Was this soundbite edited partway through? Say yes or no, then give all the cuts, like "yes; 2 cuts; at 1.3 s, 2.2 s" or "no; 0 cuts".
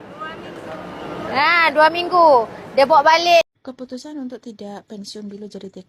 yes; 1 cut; at 3.5 s